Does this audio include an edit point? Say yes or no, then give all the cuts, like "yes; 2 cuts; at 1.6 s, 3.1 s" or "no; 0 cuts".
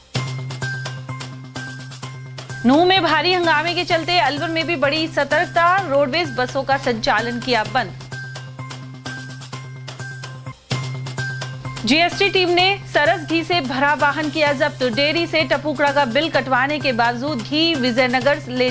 yes; 1 cut; at 1.0 s